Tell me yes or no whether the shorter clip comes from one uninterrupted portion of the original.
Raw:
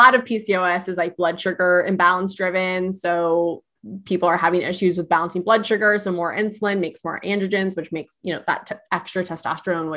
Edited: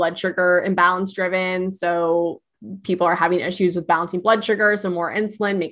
yes